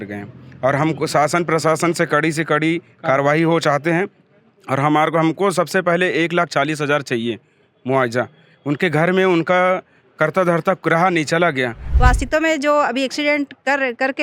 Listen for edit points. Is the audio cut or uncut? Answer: cut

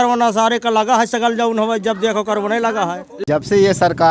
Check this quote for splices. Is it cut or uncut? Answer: cut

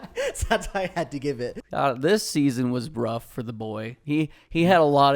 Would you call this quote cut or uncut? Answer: cut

